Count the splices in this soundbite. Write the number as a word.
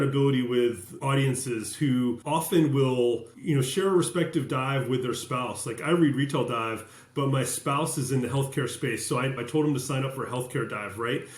four